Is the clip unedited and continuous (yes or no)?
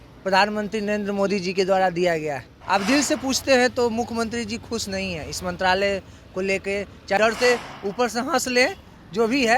no